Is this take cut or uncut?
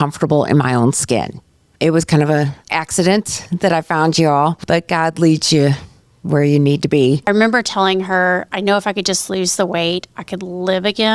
cut